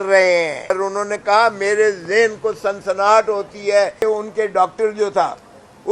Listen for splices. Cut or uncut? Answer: cut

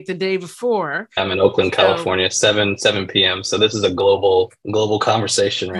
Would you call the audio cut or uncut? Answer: cut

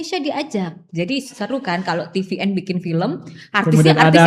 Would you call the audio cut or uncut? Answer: uncut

